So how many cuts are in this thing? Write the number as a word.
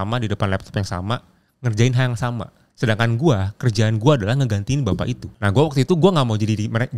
two